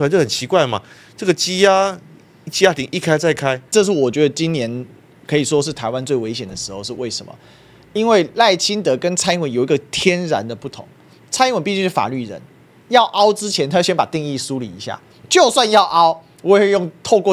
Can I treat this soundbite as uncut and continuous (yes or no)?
no